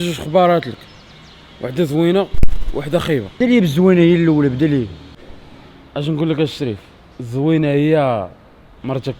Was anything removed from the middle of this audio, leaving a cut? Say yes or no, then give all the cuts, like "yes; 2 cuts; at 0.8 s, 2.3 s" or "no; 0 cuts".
yes; 1 cut; at 3.3 s